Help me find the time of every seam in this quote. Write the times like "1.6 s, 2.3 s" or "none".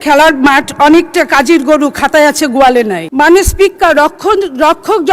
3.0 s